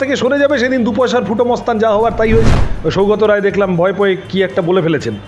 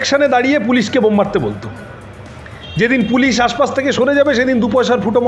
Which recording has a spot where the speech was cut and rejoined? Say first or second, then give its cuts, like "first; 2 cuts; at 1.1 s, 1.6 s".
first; 1 cut; at 2.6 s